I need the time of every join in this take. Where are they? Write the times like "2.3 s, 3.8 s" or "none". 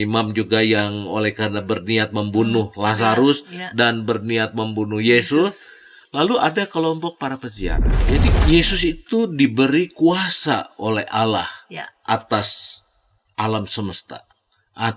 7.9 s